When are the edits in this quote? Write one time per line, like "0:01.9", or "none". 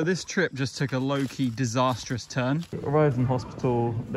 0:02.8